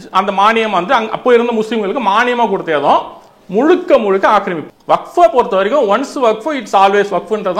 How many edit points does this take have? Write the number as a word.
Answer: one